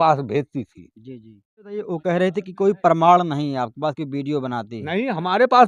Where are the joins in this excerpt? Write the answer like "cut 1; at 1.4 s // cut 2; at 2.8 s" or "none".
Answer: cut 1; at 1.7 s